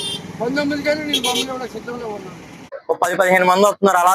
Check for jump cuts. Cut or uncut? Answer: cut